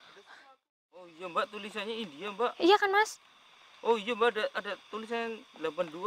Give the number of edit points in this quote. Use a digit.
1